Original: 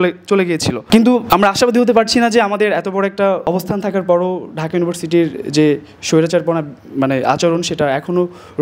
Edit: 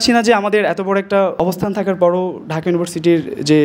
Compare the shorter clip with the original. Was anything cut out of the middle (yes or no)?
no